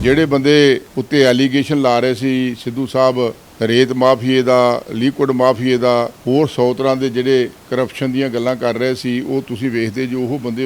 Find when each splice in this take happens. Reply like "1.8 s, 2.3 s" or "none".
0.9 s, 3.4 s, 6.2 s, 7.6 s